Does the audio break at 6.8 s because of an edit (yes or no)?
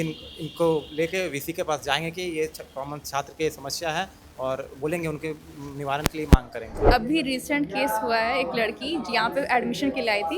yes